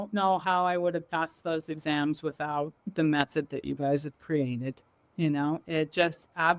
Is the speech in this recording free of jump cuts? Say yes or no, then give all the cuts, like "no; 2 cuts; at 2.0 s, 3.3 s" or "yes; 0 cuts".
yes; 0 cuts